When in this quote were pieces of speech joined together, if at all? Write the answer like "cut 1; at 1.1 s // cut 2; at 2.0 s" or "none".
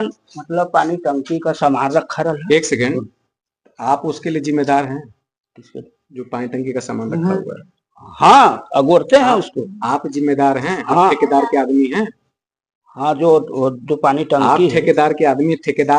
none